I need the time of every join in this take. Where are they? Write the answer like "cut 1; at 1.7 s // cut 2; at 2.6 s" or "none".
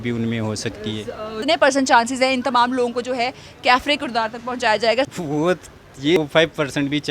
cut 1; at 1.4 s // cut 2; at 5.1 s // cut 3; at 6.2 s